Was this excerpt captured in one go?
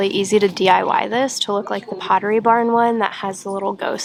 yes; 0 cuts

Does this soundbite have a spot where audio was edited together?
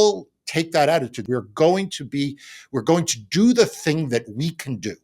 yes; 1 cut; at 1.2 s

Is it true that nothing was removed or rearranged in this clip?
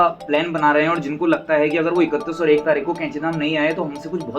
yes; 0 cuts

